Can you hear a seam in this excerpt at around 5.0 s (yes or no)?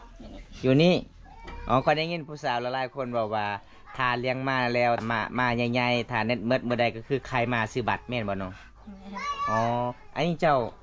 yes